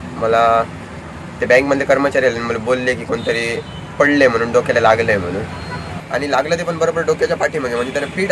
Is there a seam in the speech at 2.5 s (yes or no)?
no